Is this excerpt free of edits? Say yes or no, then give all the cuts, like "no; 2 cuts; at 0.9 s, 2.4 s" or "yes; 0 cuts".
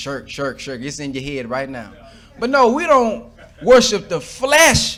yes; 0 cuts